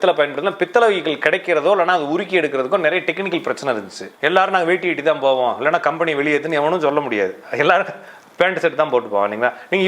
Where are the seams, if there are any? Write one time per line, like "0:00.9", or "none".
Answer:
0:04.0